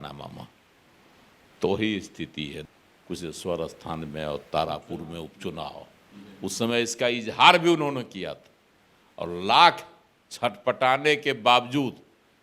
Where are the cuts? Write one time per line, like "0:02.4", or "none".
0:02.6